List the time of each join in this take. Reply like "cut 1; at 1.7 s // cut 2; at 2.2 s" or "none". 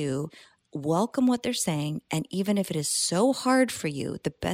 none

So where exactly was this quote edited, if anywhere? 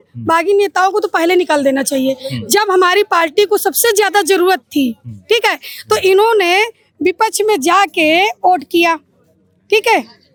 none

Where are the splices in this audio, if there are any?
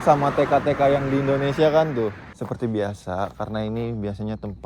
cut 1; at 2.2 s

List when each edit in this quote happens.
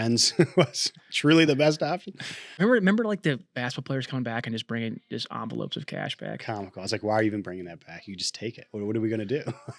cut 1; at 2.6 s

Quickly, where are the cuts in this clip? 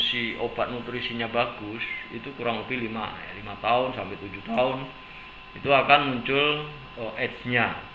none

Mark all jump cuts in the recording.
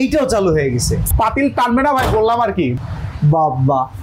cut 1; at 1.1 s // cut 2; at 2.7 s

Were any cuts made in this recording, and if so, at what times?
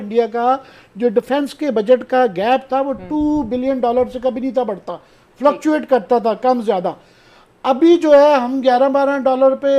none

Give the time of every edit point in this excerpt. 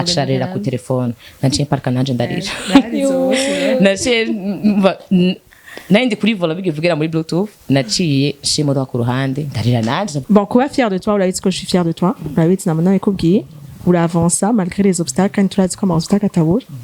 cut 1; at 10.2 s

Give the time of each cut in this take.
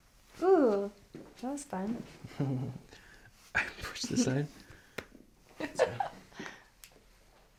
none

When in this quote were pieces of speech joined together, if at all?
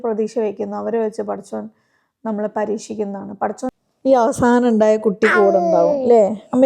cut 1; at 3.7 s

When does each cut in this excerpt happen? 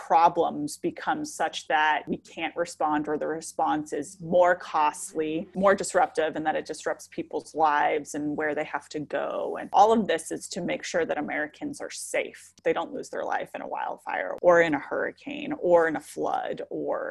cut 1; at 14.3 s

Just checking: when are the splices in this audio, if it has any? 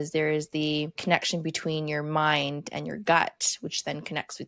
cut 1; at 1.0 s

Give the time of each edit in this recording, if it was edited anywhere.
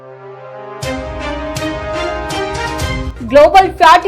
cut 1; at 3.1 s

